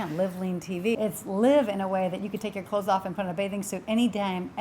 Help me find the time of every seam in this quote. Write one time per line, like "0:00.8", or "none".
0:00.9